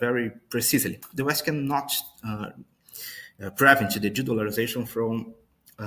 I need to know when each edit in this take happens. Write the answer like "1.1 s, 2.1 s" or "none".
1.0 s